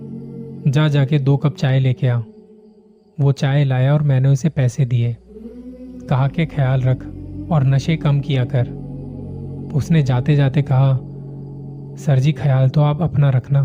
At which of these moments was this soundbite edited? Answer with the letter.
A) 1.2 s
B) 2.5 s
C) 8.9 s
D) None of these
D